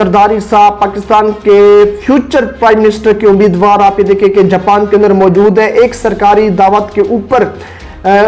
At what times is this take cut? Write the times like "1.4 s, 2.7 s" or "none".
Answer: none